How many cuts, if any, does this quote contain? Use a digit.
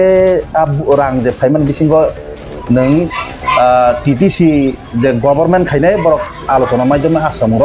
0